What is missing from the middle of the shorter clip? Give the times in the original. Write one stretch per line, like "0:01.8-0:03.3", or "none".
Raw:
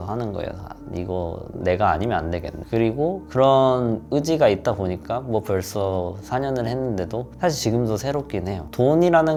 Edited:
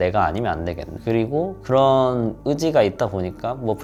none